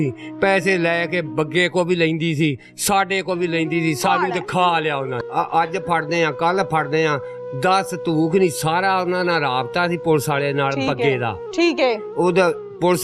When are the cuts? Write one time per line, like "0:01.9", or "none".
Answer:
0:05.2